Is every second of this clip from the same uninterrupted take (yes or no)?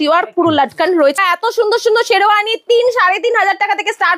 no